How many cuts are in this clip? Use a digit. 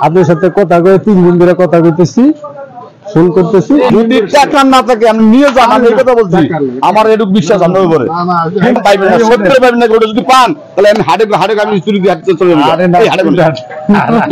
2